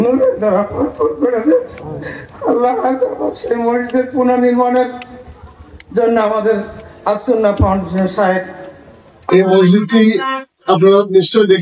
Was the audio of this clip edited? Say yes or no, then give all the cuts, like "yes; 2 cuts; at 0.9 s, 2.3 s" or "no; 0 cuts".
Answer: yes; 1 cut; at 9.2 s